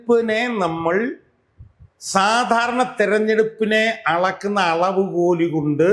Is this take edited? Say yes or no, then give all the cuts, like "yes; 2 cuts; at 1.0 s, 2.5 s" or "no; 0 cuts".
no; 0 cuts